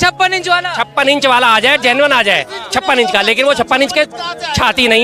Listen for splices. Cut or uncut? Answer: uncut